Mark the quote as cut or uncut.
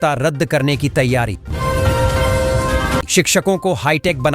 cut